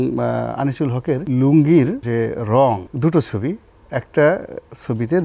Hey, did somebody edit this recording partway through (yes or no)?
yes